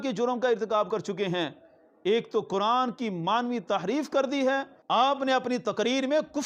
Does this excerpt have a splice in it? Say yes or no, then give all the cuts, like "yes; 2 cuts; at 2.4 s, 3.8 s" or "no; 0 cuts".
yes; 1 cut; at 4.8 s